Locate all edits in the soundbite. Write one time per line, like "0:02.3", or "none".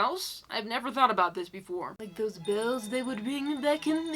0:02.0